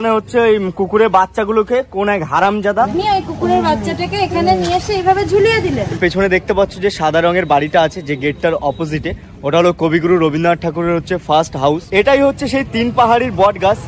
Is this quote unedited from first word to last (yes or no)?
no